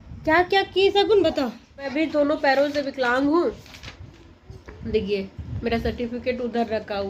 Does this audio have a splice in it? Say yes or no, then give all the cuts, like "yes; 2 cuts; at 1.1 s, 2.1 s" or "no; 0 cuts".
yes; 1 cut; at 1.9 s